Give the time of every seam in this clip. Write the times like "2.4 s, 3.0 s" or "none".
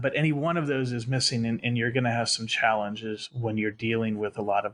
none